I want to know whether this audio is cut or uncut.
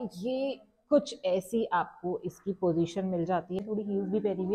cut